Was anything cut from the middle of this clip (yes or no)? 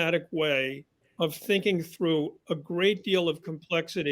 no